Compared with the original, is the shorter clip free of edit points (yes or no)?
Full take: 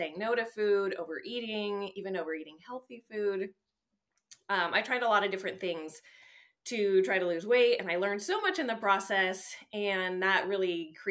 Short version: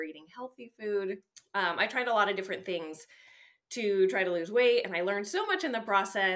no